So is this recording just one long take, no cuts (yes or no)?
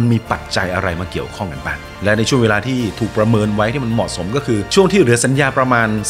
no